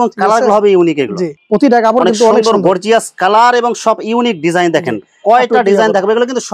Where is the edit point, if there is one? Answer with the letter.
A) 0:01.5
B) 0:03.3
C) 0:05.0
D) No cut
D